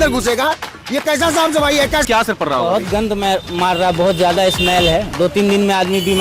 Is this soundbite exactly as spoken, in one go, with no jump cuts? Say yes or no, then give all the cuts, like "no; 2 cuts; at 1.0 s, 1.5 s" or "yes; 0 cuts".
no; 1 cut; at 2.0 s